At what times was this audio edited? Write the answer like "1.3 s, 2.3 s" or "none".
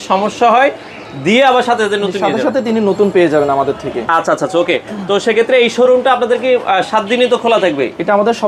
none